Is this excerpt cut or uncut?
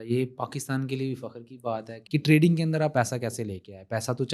cut